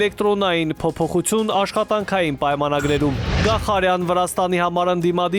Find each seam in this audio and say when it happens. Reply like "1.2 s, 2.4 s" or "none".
none